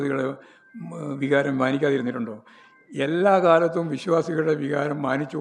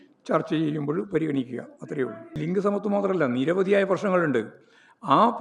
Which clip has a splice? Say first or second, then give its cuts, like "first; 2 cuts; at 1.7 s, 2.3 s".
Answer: second; 1 cut; at 2.4 s